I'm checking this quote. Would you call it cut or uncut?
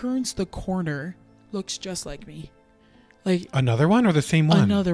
uncut